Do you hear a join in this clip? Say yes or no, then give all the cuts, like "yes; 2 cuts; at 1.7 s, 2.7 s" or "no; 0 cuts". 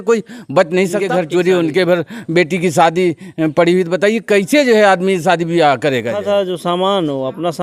yes; 2 cuts; at 1.0 s, 6.2 s